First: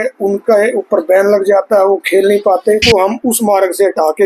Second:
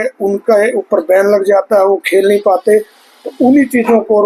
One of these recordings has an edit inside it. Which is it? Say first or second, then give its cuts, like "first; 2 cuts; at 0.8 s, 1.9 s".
first; 1 cut; at 2.8 s